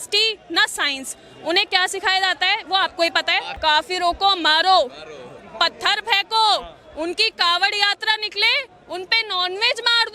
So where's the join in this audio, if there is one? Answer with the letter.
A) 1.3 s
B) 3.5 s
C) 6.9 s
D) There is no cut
B